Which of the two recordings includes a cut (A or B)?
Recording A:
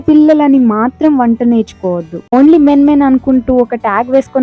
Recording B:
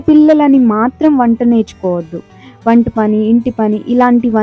A